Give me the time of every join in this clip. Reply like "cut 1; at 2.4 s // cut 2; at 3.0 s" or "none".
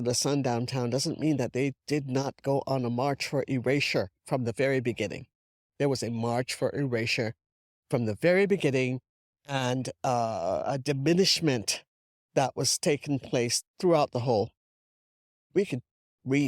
cut 1; at 15.4 s